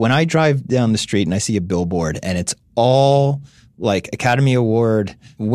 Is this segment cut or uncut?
uncut